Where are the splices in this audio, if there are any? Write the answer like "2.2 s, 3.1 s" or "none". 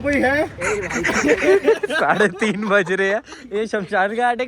none